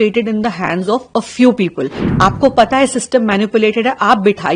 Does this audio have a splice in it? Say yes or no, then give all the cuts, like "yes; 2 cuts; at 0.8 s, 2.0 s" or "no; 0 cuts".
yes; 1 cut; at 2.1 s